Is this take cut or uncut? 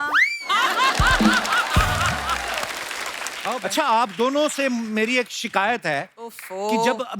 cut